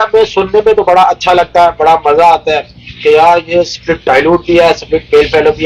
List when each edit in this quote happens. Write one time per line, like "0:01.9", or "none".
none